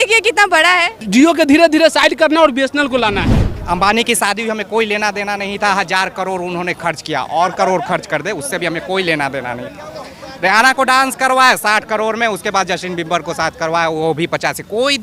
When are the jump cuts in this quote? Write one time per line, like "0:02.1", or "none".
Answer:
0:01.0
0:03.6